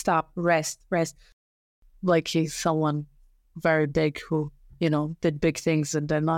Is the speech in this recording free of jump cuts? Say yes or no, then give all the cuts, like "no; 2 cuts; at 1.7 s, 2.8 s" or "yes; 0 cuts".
no; 1 cut; at 1.2 s